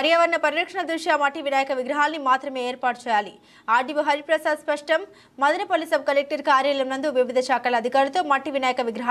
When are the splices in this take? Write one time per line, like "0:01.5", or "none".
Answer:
none